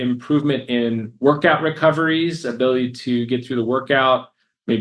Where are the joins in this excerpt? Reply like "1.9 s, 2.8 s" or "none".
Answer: none